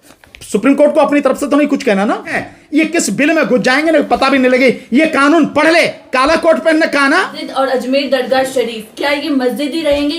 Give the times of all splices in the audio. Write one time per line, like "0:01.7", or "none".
0:02.5
0:07.4

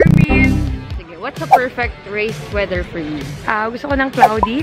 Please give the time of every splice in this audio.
0:01.0

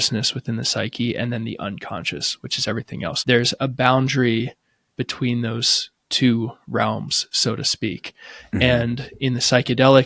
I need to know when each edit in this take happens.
0:03.2

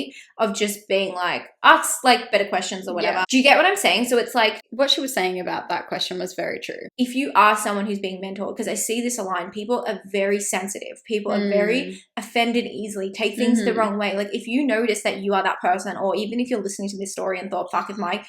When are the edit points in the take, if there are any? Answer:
0:03.3
0:04.6
0:06.8

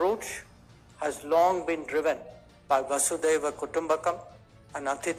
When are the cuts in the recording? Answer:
none

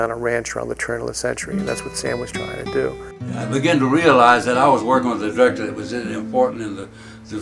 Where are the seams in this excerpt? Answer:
0:03.4

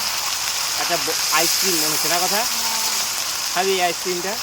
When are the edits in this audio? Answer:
none

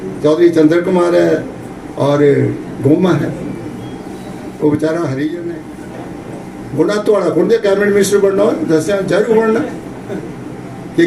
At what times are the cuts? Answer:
0:05.4

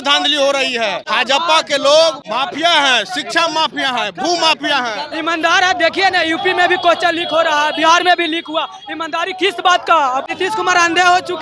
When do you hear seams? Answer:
0:01.0
0:02.2
0:05.1
0:10.3

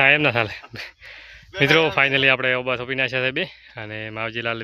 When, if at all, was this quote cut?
none

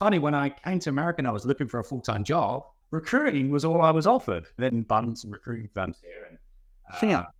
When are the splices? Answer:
none

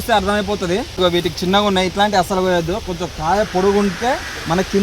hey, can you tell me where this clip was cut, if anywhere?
0:01.0

